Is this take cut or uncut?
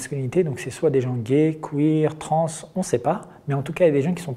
uncut